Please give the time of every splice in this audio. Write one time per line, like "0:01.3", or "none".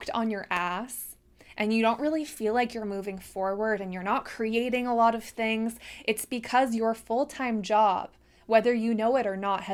none